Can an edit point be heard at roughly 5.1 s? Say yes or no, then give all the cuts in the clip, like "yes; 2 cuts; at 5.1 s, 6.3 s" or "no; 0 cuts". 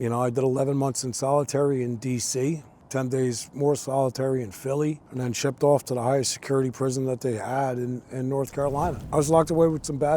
yes; 3 cuts; at 2.7 s, 5.1 s, 9.0 s